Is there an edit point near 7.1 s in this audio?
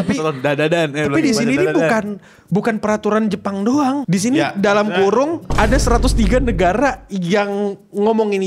no; 2 cuts; at 4.0 s, 5.5 s

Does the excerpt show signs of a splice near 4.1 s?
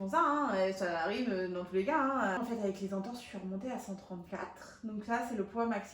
no; 1 cut; at 2.4 s

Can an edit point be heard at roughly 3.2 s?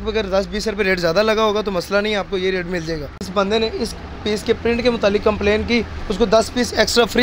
yes; 1 cut; at 3.2 s

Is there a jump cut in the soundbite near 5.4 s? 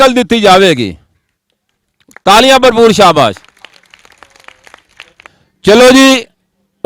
yes; 1 cut; at 5.4 s

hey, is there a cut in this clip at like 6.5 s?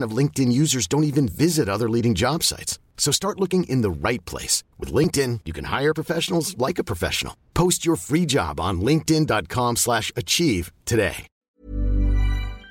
no; 1 cut; at 11.4 s

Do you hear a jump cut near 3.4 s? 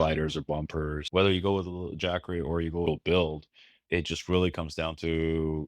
no; 1 cut; at 1.1 s

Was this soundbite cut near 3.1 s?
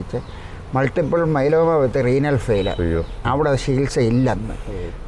no; 0 cuts

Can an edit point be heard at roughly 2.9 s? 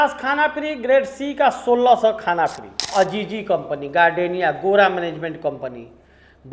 yes; 1 cut; at 2.9 s

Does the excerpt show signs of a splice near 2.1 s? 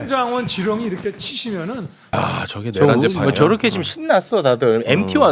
yes; 1 cut; at 2.1 s

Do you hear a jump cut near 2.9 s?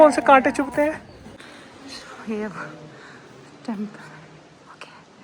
no; 1 cut; at 1.3 s

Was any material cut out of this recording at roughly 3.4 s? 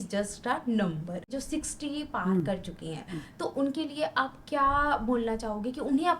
no; 1 cut; at 1.4 s

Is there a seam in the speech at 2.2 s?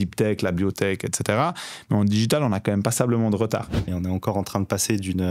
no; 1 cut; at 3.9 s

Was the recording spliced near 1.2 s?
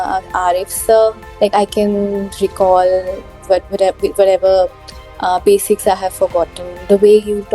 yes; 1 cut; at 1.2 s

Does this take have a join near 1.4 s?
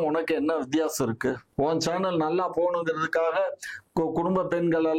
yes; 1 cut; at 1.4 s

